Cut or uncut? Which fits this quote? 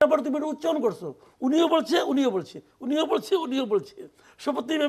uncut